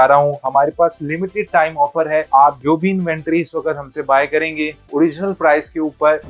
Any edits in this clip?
yes; 1 cut; at 2.3 s

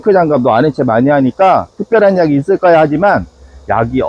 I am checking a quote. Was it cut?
no; 0 cuts

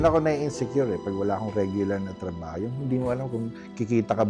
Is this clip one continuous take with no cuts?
yes; 0 cuts

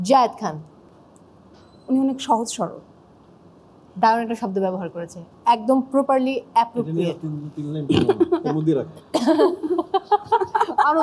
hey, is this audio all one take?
yes; 0 cuts

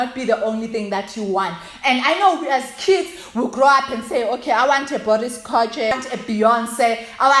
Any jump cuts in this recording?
yes; 1 cut; at 5.9 s

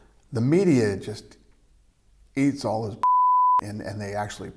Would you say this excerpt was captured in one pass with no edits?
yes; 0 cuts

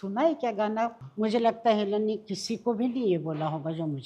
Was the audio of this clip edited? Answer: yes; 1 cut; at 1.0 s

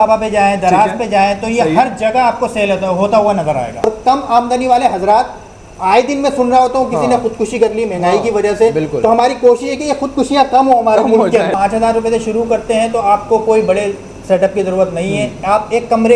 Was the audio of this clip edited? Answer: yes; 2 cuts; at 3.8 s, 11.5 s

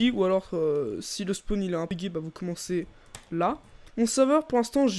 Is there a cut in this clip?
yes; 2 cuts; at 1.9 s, 3.6 s

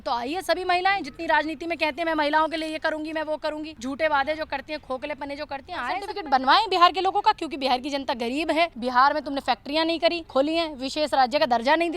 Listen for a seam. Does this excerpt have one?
yes; 4 cuts; at 3.7 s, 6.1 s, 8.8 s, 10.2 s

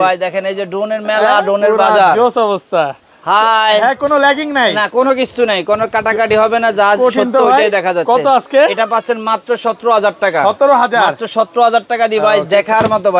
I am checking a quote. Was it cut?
no; 0 cuts

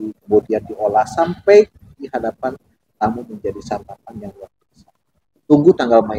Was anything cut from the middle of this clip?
no; 0 cuts

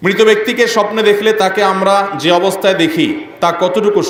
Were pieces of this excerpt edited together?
no; 0 cuts

